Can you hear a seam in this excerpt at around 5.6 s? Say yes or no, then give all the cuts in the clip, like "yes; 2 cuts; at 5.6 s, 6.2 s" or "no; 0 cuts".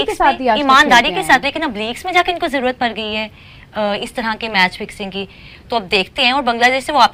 no; 0 cuts